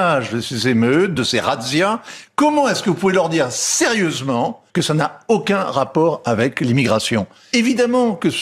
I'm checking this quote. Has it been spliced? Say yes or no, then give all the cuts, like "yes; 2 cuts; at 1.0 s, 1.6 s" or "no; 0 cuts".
yes; 2 cuts; at 4.6 s, 7.4 s